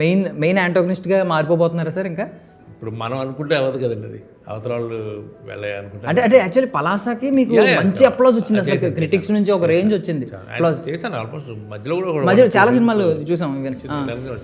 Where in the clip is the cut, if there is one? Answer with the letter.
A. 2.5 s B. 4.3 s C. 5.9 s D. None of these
A